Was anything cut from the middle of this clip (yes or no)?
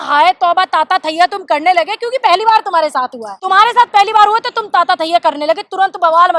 yes